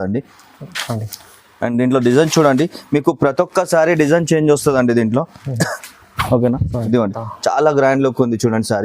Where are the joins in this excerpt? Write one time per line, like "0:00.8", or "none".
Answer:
0:07.2